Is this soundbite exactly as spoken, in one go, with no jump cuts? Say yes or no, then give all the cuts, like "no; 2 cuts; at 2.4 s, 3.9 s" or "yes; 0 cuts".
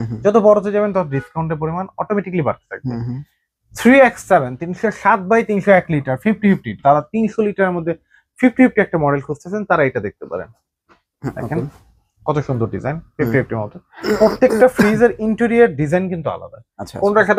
yes; 0 cuts